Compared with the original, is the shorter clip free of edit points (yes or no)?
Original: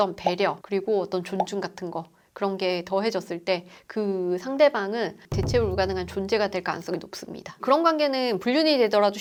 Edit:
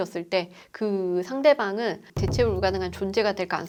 yes